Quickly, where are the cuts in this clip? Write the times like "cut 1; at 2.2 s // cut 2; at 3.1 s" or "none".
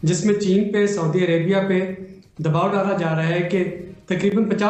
none